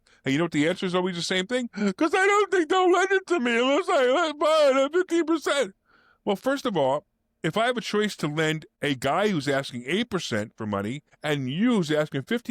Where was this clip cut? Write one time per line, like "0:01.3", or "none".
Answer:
0:08.7
0:11.1